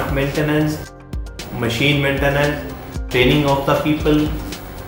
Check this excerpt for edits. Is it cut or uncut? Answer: cut